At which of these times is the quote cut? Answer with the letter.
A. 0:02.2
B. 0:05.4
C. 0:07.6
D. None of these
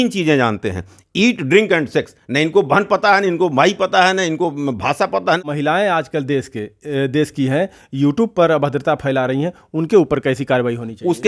B